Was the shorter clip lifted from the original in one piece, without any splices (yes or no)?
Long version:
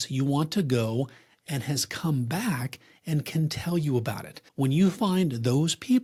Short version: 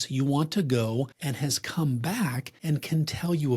no